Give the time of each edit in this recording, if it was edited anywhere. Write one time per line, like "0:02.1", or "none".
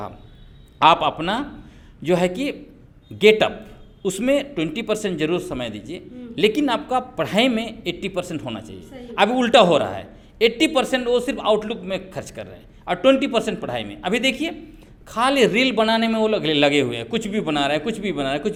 none

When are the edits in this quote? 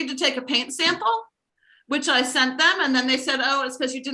none

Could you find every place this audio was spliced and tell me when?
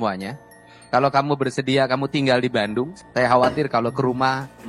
0:02.9

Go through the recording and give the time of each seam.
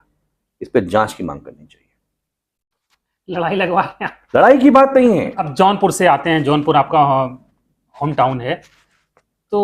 0:05.4

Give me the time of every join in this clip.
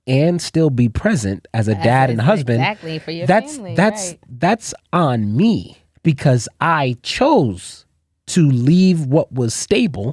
none

